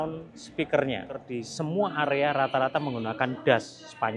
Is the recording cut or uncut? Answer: cut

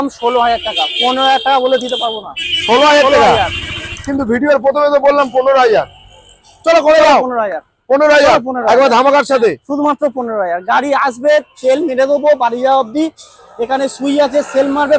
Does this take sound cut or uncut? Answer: uncut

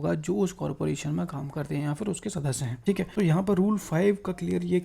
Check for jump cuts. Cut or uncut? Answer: cut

